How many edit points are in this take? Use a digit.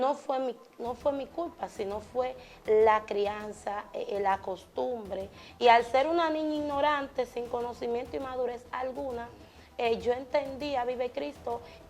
1